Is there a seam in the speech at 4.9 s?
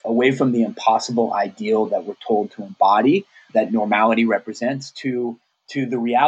no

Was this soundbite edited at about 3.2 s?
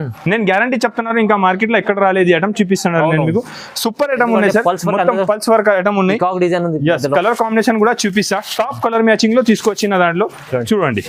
no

